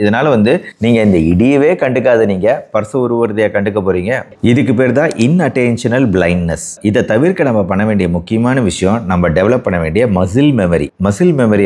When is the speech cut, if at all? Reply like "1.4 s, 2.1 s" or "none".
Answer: 4.3 s